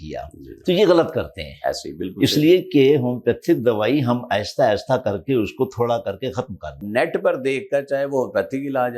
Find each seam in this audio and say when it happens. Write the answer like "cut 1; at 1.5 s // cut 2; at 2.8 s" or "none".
cut 1; at 6.8 s